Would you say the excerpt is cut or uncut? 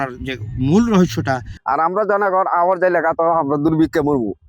cut